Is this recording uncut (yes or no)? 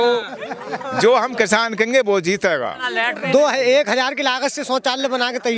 no